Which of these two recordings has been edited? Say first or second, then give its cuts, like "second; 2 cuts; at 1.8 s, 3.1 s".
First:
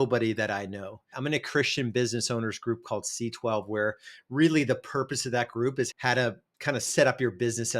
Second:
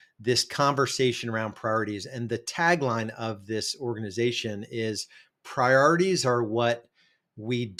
first; 2 cuts; at 1.1 s, 6.0 s